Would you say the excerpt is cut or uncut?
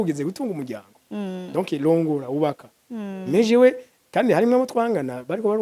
uncut